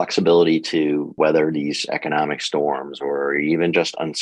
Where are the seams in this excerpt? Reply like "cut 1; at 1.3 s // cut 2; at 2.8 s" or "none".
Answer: cut 1; at 1.1 s